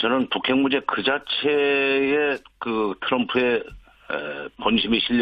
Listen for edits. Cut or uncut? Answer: uncut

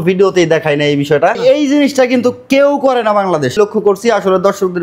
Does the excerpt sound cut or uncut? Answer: cut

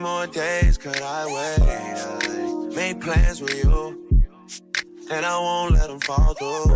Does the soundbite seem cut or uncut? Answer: cut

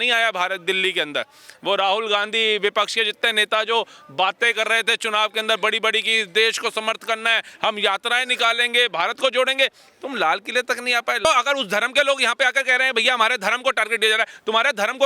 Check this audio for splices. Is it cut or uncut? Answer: cut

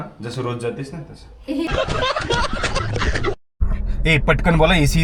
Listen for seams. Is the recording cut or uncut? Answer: cut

